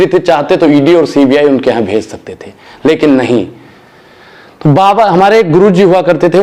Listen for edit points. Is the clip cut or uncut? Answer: uncut